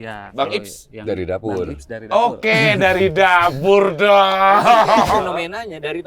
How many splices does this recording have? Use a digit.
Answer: 1